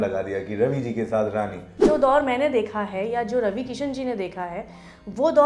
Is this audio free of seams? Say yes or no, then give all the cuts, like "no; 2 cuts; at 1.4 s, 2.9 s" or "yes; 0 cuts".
no; 1 cut; at 1.8 s